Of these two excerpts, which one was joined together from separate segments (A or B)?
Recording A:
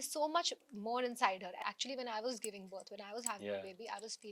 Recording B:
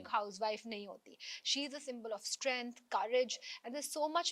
A